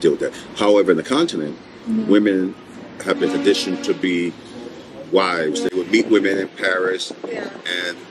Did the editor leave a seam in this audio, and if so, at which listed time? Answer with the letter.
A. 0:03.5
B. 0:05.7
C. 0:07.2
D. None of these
B